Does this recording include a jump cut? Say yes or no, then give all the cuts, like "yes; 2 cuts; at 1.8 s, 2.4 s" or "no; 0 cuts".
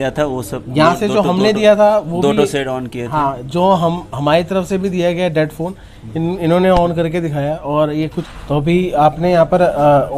yes; 1 cut; at 8.1 s